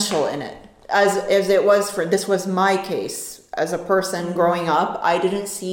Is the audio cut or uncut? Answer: uncut